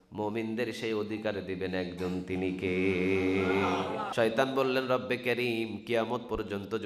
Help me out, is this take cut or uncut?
cut